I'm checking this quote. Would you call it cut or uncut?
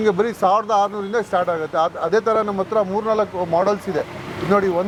uncut